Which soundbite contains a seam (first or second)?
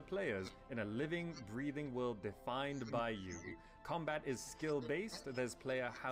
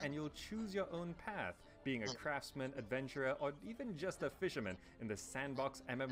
second